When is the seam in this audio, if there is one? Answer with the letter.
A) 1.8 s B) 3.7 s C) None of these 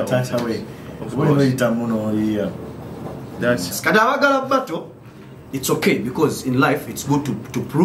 B